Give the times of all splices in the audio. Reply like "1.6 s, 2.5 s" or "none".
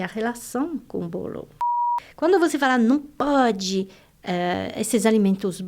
1.9 s